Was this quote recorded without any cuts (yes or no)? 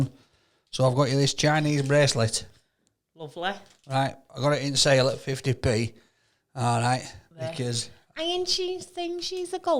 yes